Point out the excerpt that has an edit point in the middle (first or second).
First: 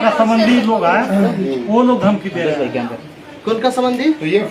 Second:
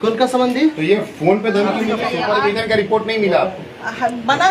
second